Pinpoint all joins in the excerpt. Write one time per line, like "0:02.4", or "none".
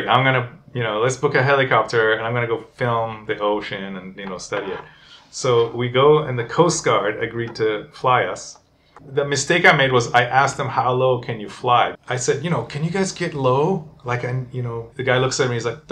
0:09.0
0:12.0
0:14.9